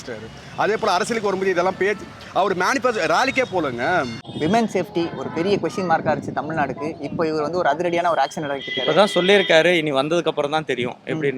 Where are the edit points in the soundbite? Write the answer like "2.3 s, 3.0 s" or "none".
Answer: none

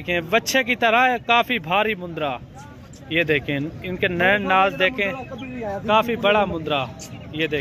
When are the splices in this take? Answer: none

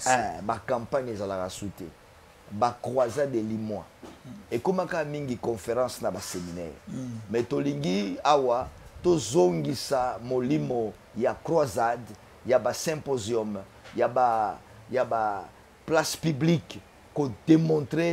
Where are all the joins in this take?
none

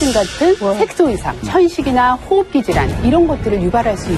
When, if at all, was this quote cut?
1.4 s

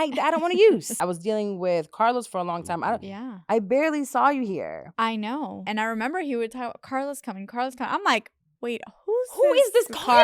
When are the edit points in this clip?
0.9 s, 5.6 s

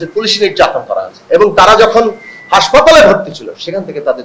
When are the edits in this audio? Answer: none

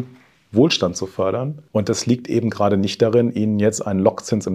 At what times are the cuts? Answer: 1.6 s

